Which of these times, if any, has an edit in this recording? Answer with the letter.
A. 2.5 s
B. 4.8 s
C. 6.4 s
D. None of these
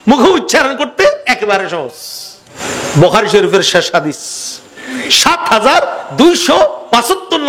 A